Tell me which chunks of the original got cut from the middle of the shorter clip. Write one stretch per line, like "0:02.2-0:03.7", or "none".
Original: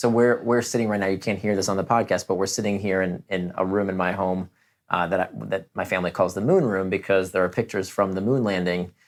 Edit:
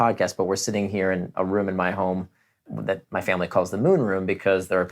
0:03.2-0:03.5
0:04.9-0:05.3

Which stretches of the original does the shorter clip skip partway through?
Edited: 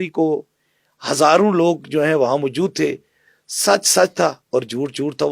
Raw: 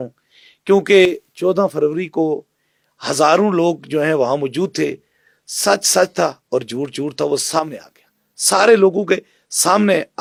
none

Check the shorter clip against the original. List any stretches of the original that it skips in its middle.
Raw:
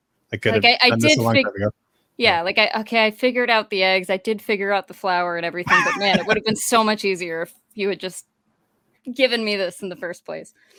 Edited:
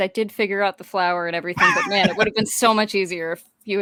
none

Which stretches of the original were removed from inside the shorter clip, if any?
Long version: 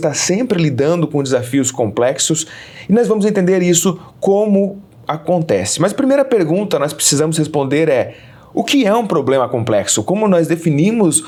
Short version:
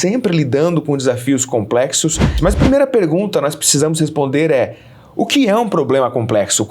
0:02.6-0:05.7

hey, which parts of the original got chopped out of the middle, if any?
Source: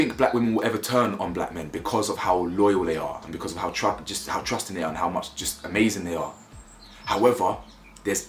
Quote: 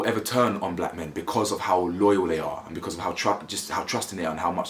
none

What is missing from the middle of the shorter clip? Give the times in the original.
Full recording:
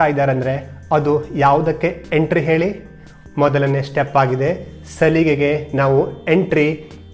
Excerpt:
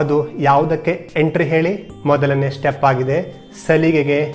0:02.9-0:03.2

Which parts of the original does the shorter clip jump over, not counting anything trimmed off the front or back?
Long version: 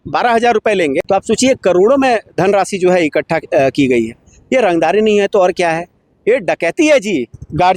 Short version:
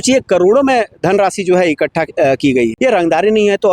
0:04.1-0:04.5

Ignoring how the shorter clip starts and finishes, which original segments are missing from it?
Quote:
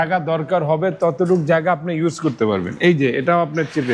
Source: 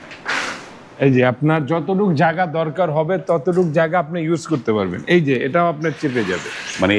none

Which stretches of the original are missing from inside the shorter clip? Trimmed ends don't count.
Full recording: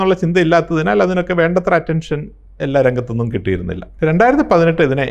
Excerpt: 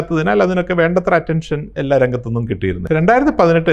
0:02.2-0:02.5
0:03.6-0:03.9

